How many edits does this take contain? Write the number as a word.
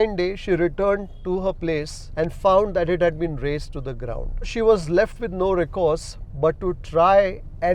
one